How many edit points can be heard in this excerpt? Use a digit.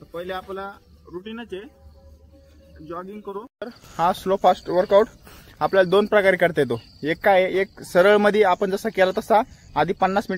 1